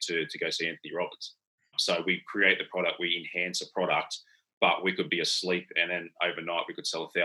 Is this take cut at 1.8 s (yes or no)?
yes